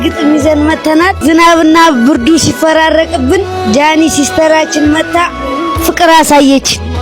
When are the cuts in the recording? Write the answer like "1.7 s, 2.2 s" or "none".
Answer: 1.2 s